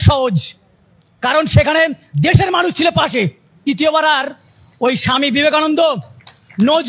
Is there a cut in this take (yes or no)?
yes